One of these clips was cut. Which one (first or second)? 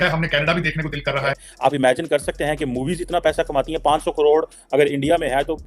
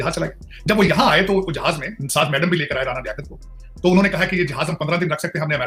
first